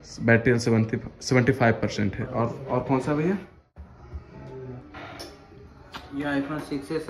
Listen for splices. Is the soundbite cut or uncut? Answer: uncut